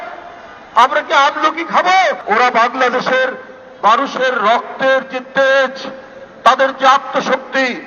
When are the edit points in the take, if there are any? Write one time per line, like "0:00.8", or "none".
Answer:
0:02.2